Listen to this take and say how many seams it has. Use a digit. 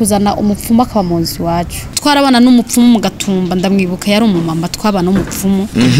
1